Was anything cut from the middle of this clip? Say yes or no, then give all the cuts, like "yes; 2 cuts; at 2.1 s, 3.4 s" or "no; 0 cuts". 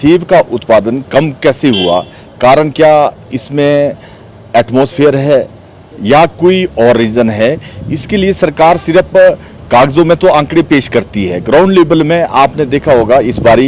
no; 0 cuts